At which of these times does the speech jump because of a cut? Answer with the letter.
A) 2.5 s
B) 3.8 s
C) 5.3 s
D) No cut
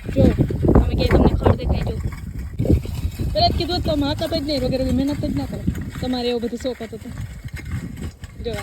A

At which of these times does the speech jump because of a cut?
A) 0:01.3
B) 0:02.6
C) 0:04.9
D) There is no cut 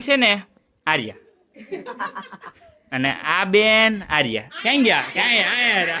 D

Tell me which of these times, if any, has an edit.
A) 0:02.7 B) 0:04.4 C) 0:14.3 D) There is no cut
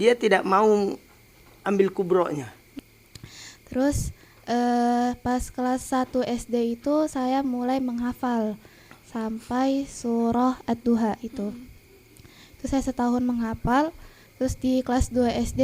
A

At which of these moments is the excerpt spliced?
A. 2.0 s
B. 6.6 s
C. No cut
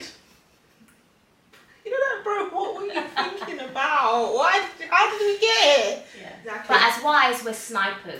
B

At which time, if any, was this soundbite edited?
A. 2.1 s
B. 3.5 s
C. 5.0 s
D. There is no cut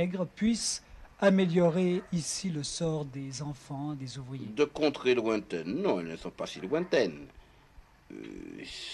D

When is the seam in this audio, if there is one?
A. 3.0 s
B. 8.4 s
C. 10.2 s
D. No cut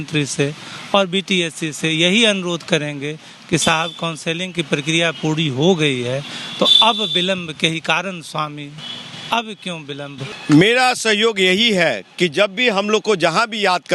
C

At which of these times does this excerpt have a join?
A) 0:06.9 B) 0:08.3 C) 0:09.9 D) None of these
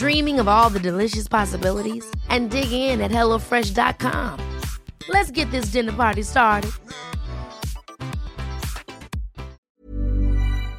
C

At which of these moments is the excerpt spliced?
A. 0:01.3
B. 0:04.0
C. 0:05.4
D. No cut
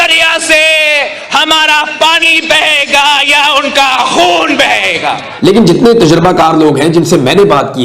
C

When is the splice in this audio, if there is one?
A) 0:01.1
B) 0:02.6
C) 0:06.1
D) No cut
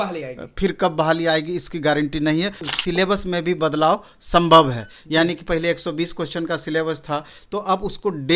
B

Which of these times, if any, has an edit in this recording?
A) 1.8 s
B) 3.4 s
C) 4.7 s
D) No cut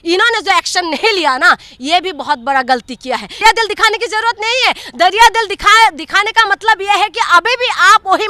B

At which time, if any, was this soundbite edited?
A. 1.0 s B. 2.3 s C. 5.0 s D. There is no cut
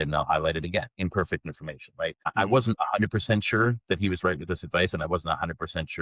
B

